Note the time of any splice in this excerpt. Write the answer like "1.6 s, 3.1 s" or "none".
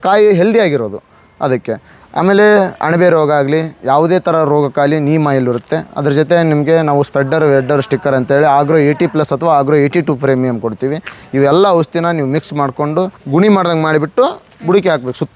13.2 s